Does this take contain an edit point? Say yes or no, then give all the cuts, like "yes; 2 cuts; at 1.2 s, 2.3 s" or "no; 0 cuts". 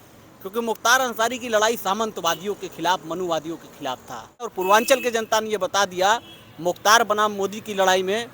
yes; 1 cut; at 4.5 s